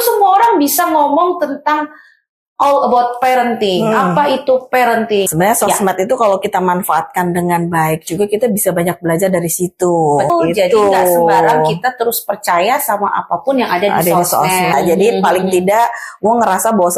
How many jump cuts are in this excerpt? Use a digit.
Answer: 3